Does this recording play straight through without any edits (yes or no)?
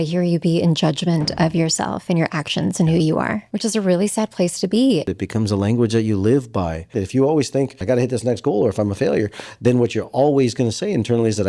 no